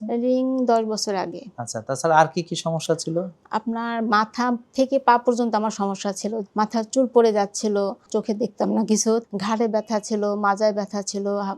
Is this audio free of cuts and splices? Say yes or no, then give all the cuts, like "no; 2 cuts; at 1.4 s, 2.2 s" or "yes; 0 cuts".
no; 3 cuts; at 6.4 s, 8.0 s, 9.2 s